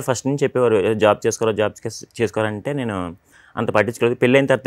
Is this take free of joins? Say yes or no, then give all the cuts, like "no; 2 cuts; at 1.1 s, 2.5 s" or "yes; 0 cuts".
yes; 0 cuts